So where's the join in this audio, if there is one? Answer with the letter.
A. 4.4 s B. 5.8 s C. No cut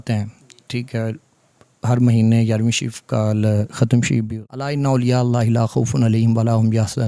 A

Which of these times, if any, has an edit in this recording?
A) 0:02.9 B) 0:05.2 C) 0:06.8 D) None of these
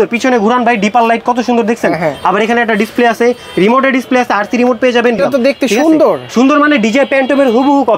B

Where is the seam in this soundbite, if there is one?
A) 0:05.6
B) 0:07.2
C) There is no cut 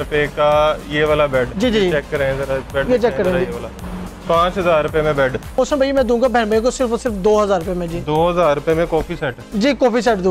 A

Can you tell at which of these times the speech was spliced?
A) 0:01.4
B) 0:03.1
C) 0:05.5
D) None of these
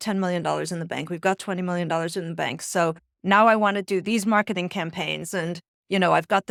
D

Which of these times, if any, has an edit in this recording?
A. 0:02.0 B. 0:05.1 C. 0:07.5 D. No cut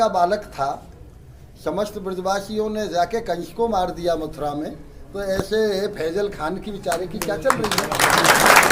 D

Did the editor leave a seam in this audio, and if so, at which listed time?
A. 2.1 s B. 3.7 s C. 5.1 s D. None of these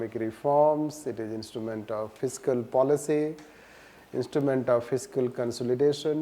A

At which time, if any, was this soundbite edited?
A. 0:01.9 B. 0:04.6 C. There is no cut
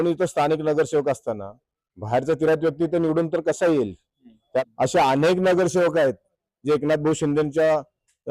B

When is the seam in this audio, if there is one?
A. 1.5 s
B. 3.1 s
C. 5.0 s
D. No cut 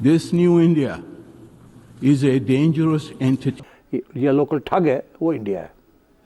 D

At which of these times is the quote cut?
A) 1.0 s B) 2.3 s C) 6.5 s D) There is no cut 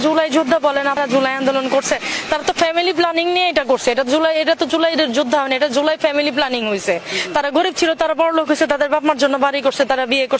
A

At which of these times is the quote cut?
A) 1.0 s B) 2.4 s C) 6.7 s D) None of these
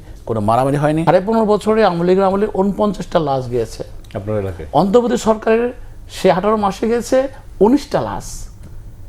A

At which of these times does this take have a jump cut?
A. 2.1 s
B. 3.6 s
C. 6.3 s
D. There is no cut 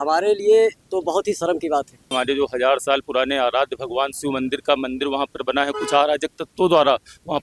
A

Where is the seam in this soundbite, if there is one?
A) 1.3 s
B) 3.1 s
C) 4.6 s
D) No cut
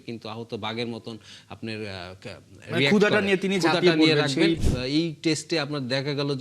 C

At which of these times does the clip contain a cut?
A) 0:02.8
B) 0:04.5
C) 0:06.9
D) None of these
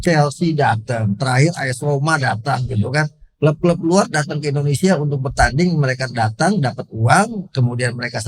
D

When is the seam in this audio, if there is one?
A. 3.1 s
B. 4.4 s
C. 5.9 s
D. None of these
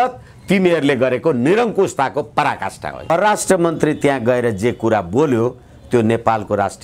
A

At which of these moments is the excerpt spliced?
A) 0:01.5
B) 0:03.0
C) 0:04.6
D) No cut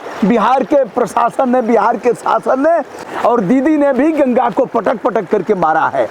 B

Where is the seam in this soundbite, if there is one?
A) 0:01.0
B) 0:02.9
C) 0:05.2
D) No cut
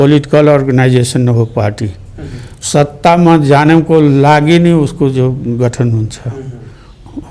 D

